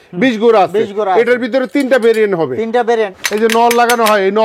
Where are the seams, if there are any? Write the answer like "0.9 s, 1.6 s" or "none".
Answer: 3.1 s

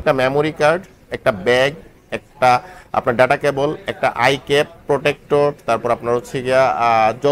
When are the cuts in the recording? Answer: none

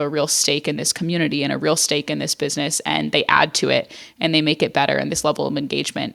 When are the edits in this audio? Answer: none

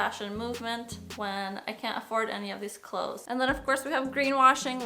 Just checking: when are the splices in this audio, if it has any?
1.0 s, 3.2 s

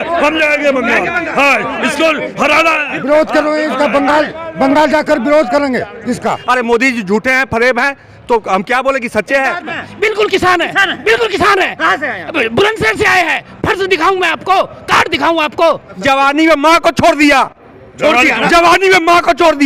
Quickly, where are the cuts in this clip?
6.4 s, 9.8 s, 15.9 s

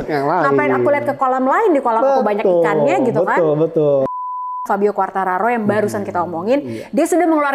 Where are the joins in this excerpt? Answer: 4.1 s

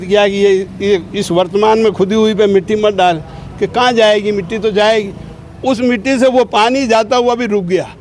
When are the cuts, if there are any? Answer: none

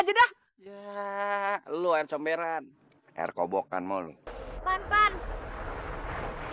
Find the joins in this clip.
4.3 s

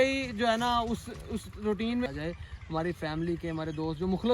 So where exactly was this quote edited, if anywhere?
2.1 s

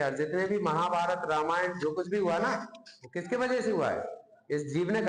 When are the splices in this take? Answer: none

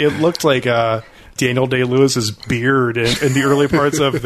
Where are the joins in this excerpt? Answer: 1.3 s

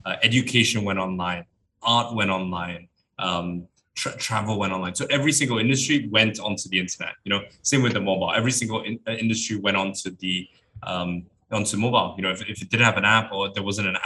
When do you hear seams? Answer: none

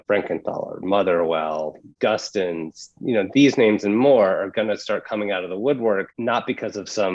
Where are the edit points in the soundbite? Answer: 1.8 s

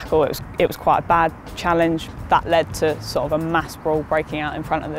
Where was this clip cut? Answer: 2.2 s, 3.3 s

